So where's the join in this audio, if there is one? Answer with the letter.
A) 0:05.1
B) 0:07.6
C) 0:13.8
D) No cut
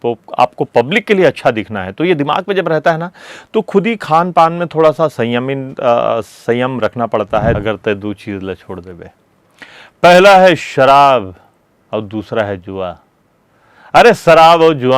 B